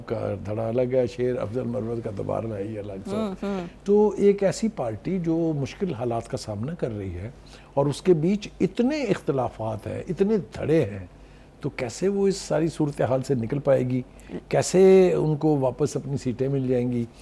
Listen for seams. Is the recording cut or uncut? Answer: uncut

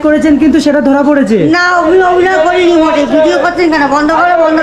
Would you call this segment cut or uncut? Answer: uncut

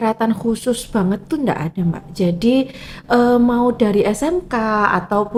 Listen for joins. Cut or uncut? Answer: uncut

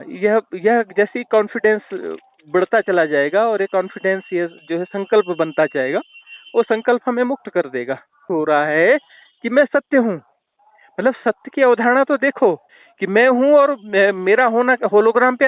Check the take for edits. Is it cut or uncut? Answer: cut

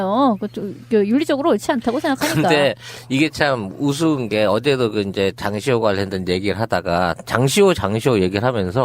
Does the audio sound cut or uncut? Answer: cut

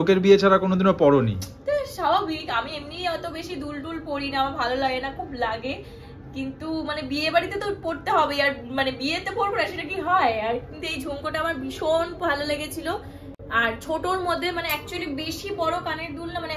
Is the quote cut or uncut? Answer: uncut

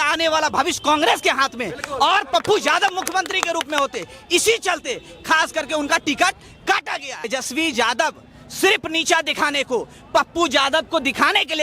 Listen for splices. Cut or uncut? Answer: cut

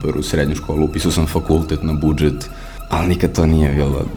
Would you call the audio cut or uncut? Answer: uncut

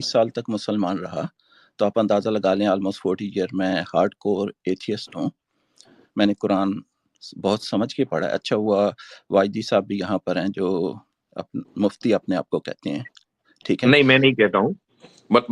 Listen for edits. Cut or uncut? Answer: uncut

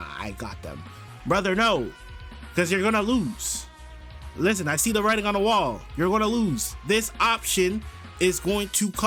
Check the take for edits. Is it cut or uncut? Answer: uncut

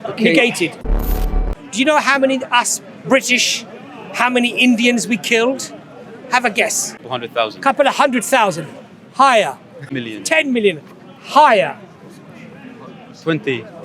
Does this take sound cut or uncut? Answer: cut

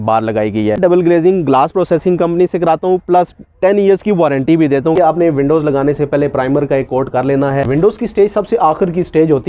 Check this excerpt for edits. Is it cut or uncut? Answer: cut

